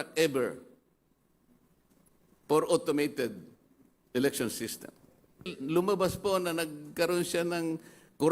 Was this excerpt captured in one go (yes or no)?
no